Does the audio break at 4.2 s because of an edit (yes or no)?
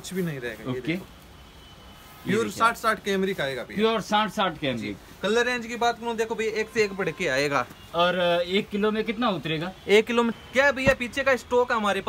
no